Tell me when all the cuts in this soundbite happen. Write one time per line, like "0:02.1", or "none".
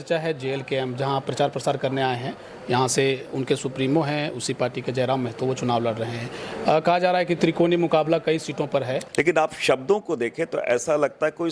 0:09.0